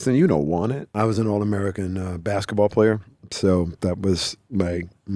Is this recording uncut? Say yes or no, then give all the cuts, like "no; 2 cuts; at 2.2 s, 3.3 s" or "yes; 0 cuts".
no; 1 cut; at 0.9 s